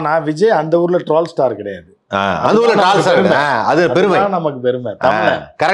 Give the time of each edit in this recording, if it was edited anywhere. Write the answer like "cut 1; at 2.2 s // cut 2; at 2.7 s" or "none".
none